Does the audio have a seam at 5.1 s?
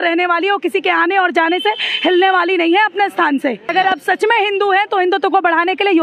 no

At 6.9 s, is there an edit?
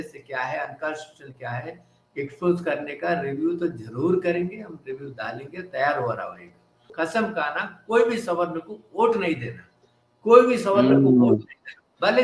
yes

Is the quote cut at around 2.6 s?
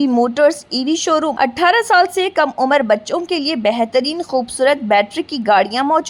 no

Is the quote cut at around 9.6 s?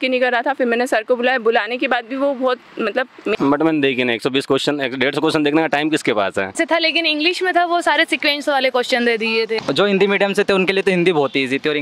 yes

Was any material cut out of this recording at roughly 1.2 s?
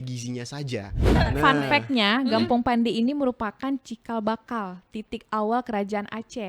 yes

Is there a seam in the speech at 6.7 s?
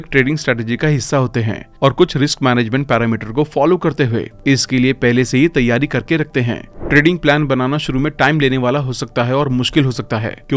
yes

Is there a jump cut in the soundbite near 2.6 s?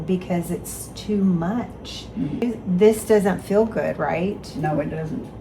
yes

